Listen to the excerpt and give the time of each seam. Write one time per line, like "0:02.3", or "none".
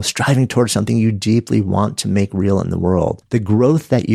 0:03.2